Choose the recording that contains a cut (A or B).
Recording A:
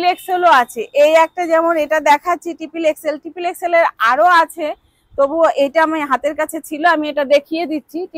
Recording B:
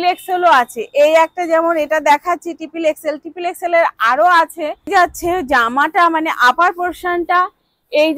B